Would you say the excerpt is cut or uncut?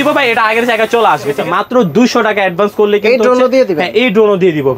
cut